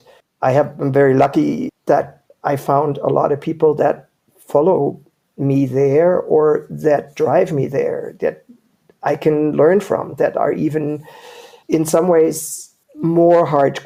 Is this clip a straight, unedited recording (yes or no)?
yes